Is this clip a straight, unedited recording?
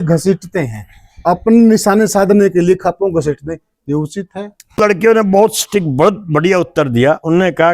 no; 1 cut; at 4.8 s

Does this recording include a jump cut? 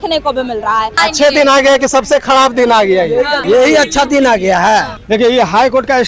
yes; 3 cuts; at 1.0 s, 3.4 s, 4.9 s

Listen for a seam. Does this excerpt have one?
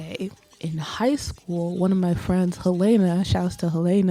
no; 0 cuts

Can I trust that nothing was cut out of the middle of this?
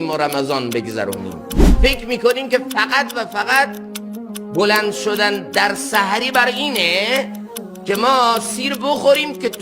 no; 1 cut; at 1.7 s

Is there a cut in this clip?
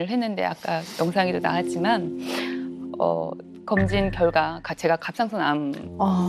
no; 0 cuts

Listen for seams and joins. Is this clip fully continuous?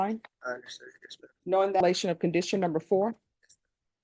no; 1 cut; at 1.8 s

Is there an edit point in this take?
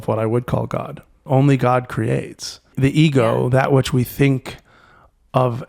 yes; 2 cuts; at 1.2 s, 2.7 s

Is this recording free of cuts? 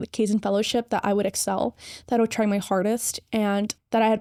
yes; 0 cuts

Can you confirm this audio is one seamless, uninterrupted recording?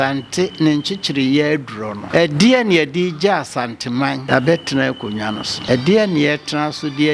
no; 3 cuts; at 2.0 s, 4.2 s, 5.5 s

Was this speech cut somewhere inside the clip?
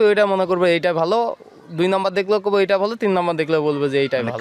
no; 0 cuts

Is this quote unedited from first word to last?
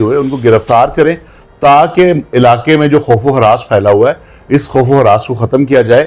yes; 0 cuts

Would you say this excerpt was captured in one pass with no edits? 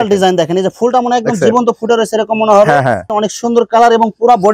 no; 1 cut; at 3.1 s

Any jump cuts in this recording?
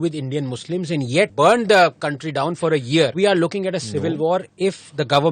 yes; 3 cuts; at 1.3 s, 3.1 s, 4.5 s

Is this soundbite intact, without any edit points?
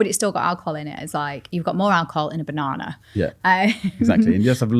yes; 0 cuts

